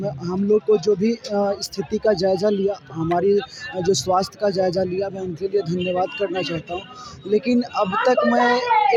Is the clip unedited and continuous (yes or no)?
yes